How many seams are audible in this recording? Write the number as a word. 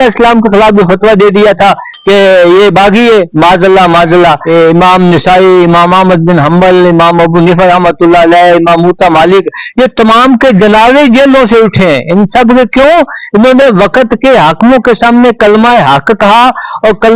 one